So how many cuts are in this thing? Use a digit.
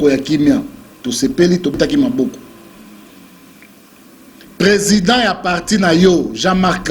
1